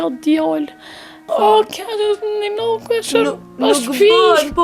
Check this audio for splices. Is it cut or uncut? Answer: cut